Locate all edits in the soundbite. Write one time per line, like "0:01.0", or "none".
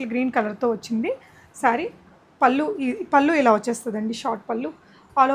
none